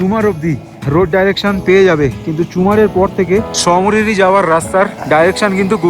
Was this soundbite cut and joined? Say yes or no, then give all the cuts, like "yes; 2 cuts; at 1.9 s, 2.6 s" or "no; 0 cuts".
yes; 3 cuts; at 0.8 s, 3.5 s, 5.0 s